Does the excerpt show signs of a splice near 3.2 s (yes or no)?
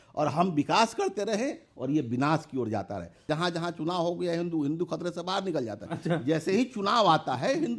yes